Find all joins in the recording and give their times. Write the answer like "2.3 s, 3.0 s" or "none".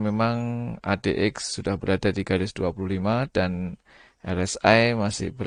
none